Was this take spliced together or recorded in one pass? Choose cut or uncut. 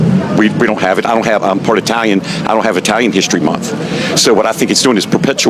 uncut